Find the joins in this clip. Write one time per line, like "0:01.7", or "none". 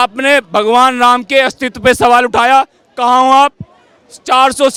none